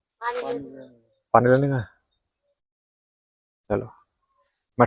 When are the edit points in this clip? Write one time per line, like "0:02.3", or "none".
none